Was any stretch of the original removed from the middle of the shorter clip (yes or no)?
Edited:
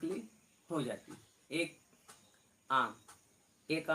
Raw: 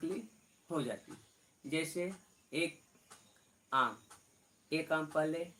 yes